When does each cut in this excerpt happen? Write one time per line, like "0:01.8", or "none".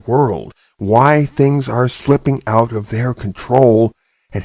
0:02.3